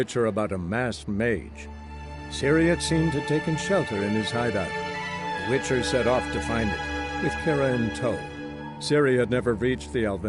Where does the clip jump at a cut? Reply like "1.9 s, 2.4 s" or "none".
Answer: none

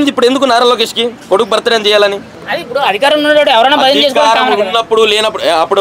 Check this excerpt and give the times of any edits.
none

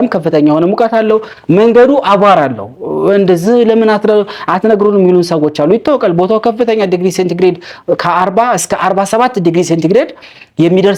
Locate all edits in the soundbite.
none

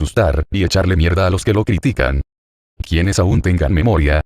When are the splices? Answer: 2.5 s

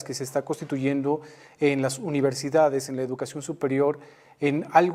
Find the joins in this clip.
none

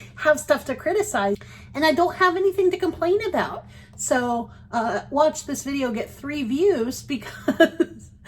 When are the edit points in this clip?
1.4 s

